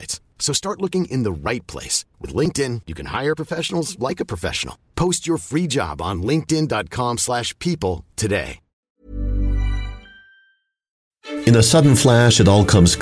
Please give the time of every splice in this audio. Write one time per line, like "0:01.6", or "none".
0:11.2